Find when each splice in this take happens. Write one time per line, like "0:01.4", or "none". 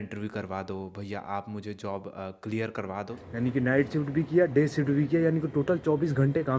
0:03.2